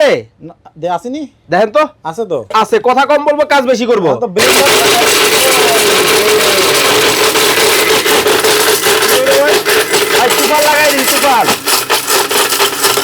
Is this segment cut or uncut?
uncut